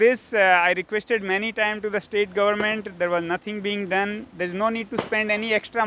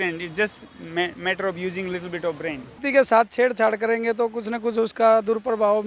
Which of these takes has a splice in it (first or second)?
second